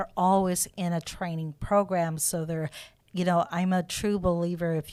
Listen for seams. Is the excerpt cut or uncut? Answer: uncut